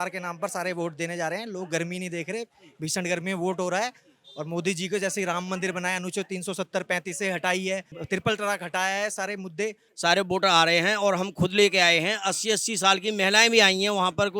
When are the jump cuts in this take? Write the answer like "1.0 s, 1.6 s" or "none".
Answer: 7.9 s, 9.8 s